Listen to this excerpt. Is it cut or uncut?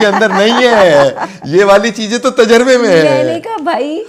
uncut